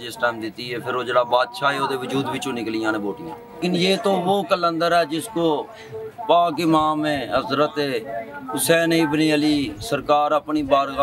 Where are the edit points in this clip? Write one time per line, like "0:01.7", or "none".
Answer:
0:03.6